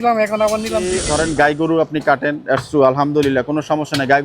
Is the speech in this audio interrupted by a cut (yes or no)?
yes